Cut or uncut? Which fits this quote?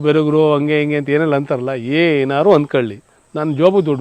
uncut